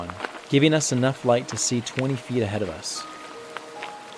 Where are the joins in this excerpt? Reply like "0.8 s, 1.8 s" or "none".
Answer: 2.8 s

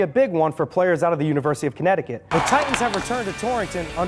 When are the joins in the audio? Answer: 2.3 s

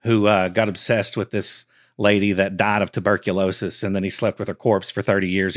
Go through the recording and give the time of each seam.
none

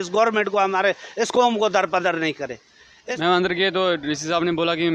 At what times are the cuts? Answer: 3.1 s

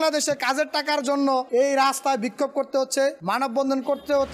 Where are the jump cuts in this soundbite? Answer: 1.5 s, 3.2 s

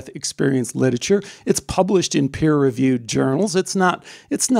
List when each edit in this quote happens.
none

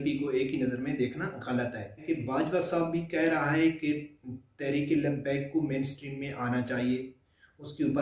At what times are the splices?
2.0 s

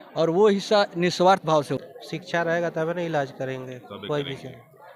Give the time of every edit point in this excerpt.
1.8 s

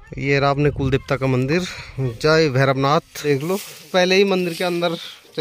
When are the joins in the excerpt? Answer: 3.2 s

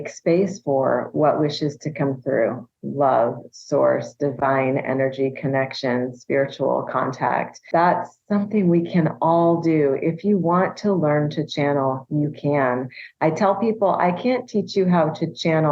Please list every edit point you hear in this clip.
7.6 s

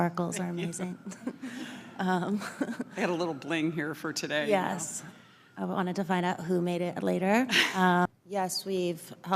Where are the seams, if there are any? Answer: 8.1 s

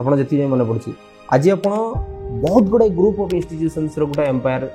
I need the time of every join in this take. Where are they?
none

